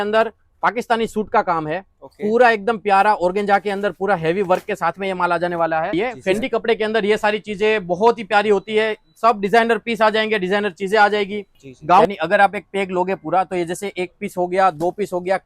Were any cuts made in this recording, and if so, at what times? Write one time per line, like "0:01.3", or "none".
0:05.9
0:12.0